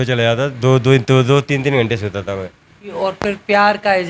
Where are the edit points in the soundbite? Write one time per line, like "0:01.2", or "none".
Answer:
0:02.9